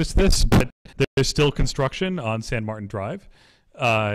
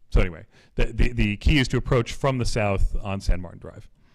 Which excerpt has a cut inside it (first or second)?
second